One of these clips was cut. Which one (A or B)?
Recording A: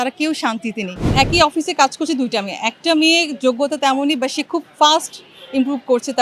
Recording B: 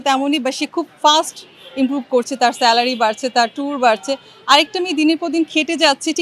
A